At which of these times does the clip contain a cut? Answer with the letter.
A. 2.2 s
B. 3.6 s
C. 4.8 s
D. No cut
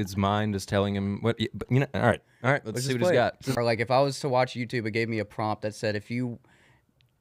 B